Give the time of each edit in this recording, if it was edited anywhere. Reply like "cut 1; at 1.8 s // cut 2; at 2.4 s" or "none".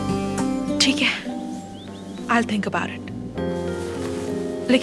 none